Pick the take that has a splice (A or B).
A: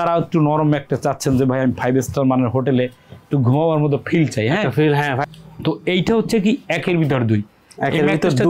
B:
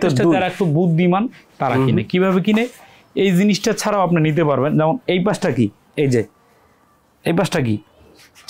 A